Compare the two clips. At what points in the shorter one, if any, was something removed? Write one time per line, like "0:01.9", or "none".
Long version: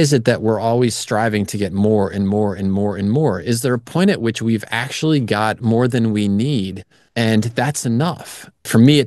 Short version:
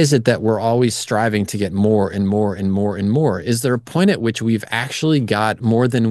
none